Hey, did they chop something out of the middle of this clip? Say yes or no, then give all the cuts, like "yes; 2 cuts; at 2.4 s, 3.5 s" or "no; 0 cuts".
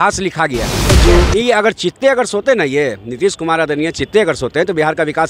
yes; 1 cut; at 1.0 s